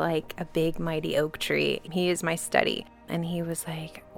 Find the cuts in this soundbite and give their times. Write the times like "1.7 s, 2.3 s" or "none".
1.9 s, 2.9 s